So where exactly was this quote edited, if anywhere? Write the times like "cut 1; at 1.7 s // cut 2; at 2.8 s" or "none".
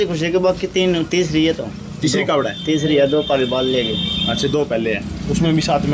none